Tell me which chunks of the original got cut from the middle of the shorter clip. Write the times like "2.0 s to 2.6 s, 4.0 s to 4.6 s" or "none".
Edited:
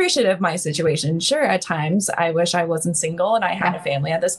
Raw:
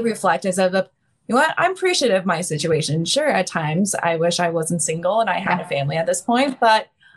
none